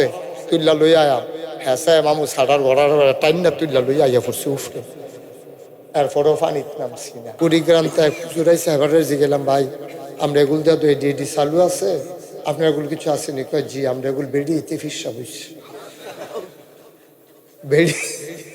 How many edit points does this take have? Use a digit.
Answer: 1